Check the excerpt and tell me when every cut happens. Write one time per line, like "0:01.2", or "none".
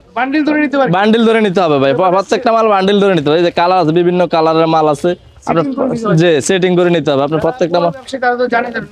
none